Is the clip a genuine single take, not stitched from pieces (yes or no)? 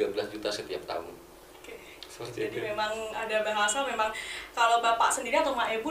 yes